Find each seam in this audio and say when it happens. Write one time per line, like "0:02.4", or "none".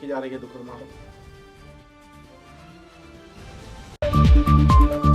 0:04.0